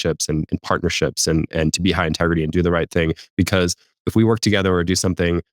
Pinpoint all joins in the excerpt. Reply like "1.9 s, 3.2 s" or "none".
4.0 s